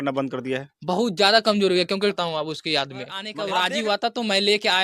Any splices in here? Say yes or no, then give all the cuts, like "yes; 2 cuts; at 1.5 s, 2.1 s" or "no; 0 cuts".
yes; 2 cuts; at 2.2 s, 3.3 s